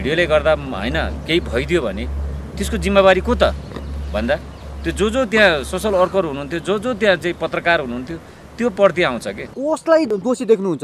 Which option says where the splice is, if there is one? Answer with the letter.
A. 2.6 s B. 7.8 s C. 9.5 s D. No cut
C